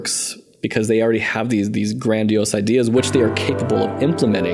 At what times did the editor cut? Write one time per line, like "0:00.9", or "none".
none